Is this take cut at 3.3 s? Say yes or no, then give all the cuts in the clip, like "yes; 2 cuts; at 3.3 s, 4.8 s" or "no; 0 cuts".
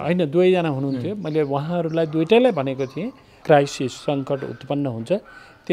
yes; 1 cut; at 3.3 s